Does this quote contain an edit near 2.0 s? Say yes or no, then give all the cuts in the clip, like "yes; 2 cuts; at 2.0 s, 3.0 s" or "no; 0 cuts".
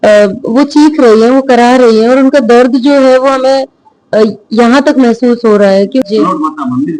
no; 1 cut; at 6.1 s